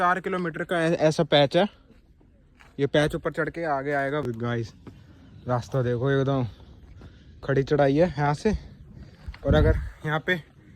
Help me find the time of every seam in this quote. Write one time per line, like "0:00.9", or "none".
0:04.2